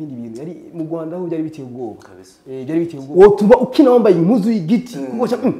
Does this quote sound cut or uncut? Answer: cut